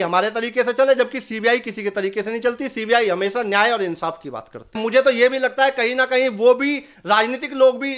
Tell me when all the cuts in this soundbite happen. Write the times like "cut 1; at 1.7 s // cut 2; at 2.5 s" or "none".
cut 1; at 4.8 s

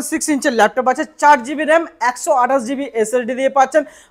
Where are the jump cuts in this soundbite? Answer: none

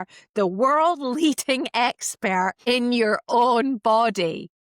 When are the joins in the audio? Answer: cut 1; at 2.6 s

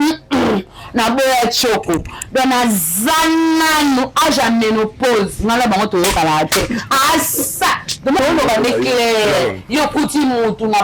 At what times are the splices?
cut 1; at 8.2 s

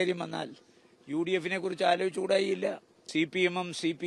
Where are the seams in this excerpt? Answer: cut 1; at 2.9 s

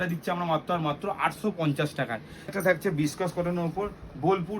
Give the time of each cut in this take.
cut 1; at 2.5 s

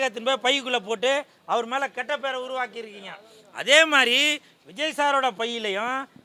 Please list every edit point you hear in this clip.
none

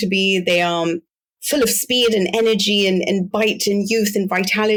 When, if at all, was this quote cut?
none

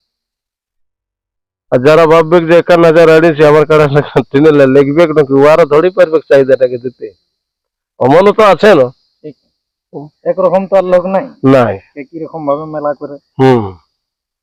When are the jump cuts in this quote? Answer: none

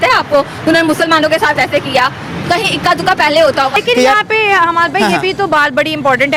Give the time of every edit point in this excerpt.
none

